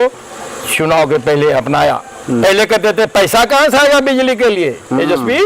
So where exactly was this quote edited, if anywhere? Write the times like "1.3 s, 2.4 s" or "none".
none